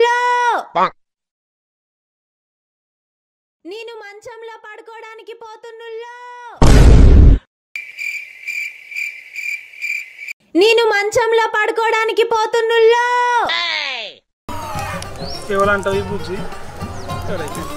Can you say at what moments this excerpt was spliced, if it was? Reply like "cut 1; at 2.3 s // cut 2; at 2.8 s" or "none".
cut 1; at 14.5 s